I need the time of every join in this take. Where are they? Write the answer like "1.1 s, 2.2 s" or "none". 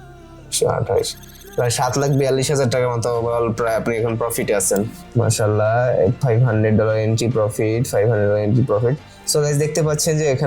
5.0 s